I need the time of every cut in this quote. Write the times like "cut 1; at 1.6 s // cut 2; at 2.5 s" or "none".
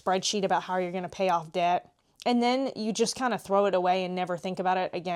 none